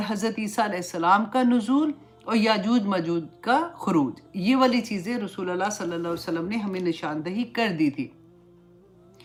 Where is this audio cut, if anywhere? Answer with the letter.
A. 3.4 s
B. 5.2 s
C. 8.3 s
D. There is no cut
D